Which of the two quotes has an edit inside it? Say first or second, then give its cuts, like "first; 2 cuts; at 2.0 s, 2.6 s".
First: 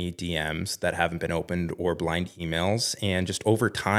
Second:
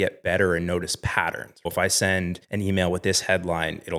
second; 2 cuts; at 1.7 s, 2.4 s